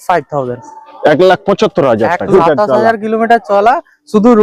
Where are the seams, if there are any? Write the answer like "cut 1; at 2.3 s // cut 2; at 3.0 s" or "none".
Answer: cut 1; at 2.3 s